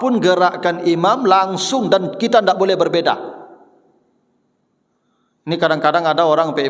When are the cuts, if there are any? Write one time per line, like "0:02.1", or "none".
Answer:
none